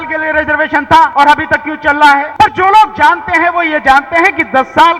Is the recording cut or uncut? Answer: cut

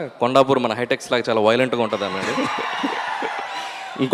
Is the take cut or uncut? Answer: uncut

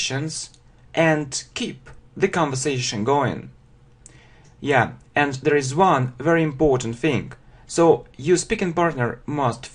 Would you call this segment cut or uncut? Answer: cut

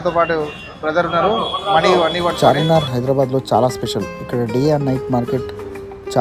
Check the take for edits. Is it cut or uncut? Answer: cut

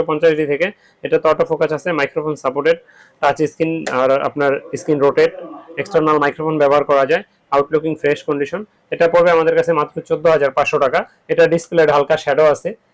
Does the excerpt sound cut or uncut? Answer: uncut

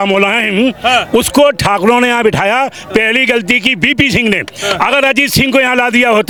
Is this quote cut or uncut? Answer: uncut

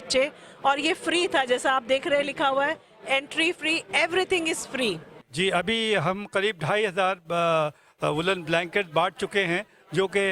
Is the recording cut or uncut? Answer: cut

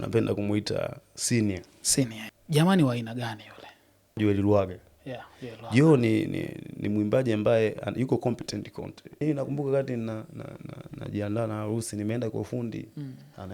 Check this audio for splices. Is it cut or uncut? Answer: cut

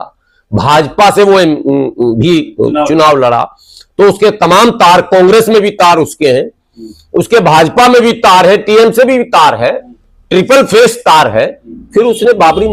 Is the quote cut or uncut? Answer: uncut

